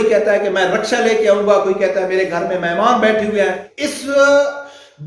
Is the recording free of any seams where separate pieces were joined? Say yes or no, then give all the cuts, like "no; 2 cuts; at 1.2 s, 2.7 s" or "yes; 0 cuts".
no; 1 cut; at 3.6 s